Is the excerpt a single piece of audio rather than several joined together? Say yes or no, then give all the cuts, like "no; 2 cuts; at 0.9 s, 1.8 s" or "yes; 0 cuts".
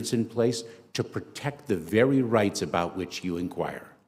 yes; 0 cuts